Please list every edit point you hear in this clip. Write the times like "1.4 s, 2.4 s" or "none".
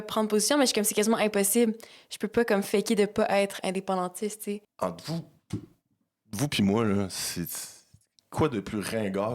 4.7 s

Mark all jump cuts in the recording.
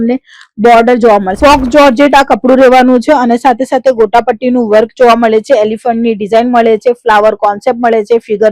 1.3 s

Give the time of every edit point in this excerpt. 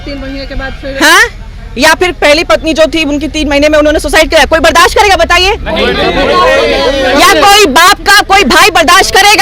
none

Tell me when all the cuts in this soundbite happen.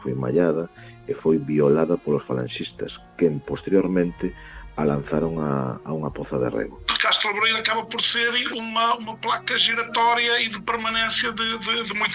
6.9 s

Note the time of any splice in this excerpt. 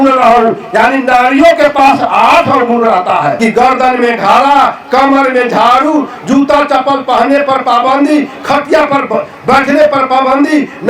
3.4 s

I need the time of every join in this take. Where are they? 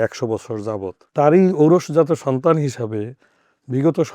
1.0 s

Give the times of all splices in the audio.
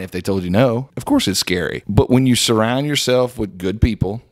0.9 s, 1.8 s

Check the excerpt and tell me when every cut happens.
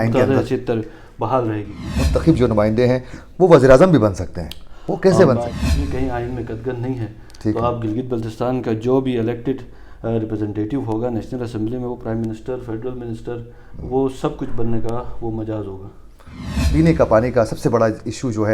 1.8 s, 5.5 s, 16.5 s

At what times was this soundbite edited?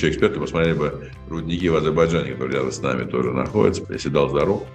3.8 s

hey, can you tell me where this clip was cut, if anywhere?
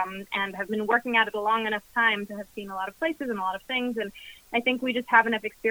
none

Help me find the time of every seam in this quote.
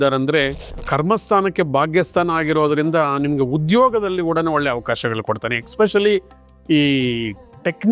none

